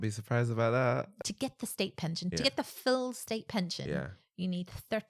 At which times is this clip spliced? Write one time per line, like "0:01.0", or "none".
0:01.1